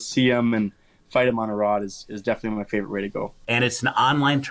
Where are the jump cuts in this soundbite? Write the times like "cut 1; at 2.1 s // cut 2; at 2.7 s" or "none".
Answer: cut 1; at 3.4 s